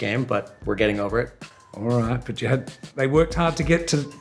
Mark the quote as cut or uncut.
uncut